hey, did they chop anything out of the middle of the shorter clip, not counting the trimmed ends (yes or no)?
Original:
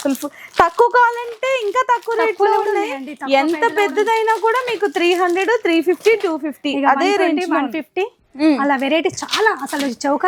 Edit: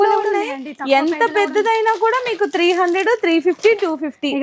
no